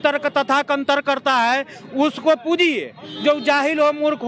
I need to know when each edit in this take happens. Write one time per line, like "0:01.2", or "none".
none